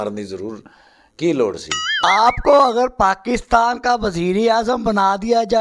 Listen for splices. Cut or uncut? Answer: cut